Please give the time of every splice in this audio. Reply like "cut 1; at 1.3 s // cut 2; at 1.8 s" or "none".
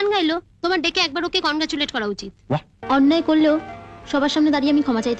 cut 1; at 2.7 s